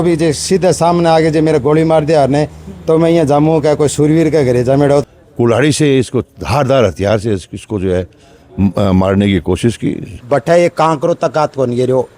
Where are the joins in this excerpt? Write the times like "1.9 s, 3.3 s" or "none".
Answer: 5.2 s, 10.1 s